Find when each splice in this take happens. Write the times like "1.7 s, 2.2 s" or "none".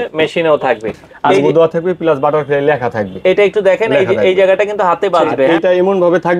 1.1 s, 5.5 s

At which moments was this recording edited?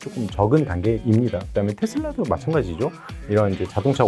1.4 s

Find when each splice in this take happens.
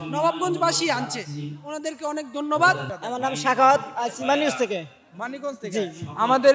2.9 s

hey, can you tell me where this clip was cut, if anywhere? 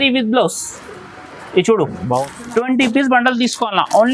2.3 s

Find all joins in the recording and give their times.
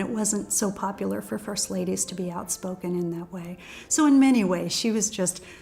none

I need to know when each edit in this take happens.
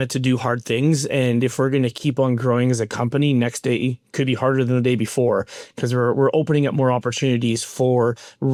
none

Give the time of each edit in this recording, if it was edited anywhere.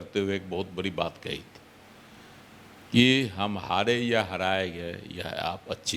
none

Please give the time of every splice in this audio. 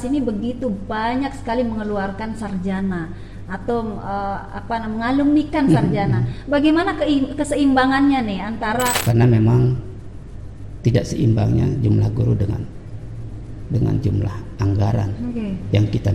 9.0 s

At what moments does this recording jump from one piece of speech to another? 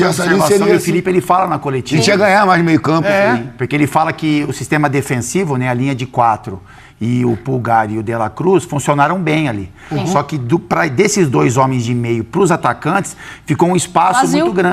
none

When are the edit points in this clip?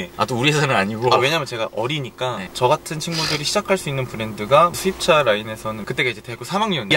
2.5 s, 5.8 s

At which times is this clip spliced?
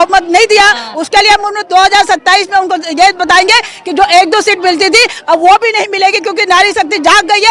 none

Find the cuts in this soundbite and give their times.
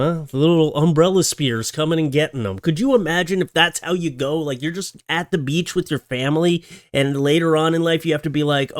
none

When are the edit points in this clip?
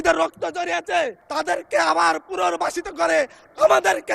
1.2 s

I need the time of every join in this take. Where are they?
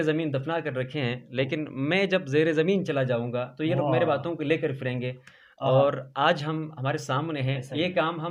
none

